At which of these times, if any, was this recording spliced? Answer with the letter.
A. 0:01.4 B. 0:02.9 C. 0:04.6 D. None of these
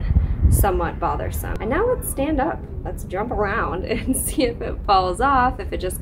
A